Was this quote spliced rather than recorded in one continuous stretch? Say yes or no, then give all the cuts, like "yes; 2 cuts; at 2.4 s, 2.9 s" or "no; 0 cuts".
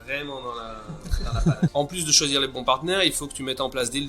yes; 1 cut; at 1.7 s